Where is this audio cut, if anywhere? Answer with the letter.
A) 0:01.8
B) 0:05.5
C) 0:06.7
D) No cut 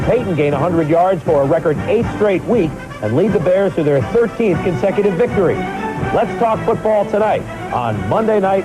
A